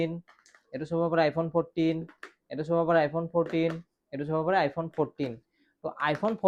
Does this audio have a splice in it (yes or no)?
no